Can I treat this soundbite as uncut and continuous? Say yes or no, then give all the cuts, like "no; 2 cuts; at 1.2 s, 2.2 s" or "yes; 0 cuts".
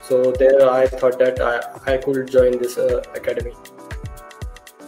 no; 1 cut; at 3.6 s